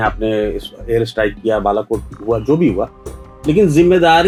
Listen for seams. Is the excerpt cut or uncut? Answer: uncut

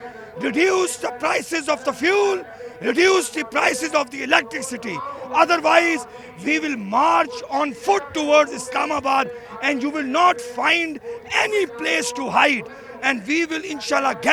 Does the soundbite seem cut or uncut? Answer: uncut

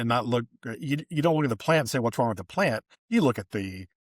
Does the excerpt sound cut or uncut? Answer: cut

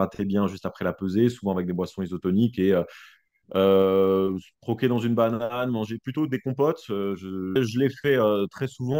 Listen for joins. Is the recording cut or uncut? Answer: cut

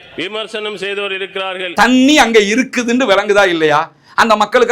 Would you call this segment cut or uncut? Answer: cut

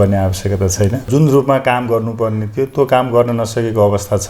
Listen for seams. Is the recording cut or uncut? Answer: cut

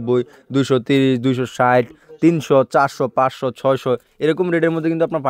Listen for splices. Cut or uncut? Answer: uncut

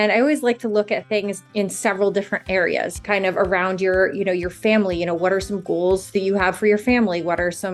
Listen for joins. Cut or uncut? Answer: cut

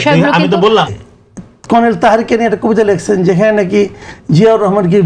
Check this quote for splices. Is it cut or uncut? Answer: cut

